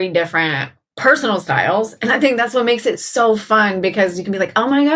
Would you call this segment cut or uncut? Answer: uncut